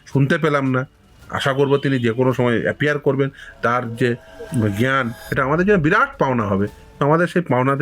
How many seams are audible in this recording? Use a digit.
1